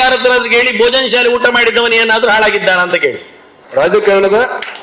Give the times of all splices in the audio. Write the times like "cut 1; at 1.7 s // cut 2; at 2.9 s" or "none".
cut 1; at 3.5 s